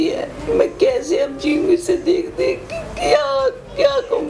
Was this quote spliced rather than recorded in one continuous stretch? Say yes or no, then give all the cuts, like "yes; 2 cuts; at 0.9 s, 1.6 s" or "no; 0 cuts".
no; 0 cuts